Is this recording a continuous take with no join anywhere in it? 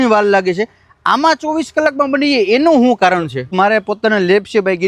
no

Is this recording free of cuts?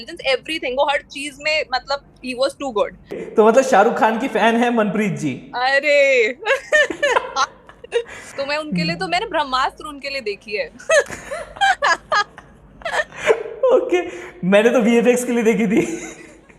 no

